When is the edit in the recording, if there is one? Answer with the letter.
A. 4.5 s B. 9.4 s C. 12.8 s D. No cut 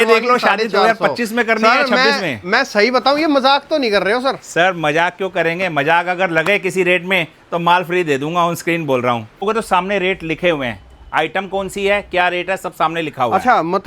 B